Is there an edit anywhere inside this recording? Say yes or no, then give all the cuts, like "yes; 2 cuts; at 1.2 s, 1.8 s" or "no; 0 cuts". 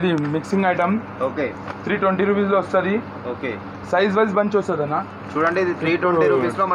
no; 0 cuts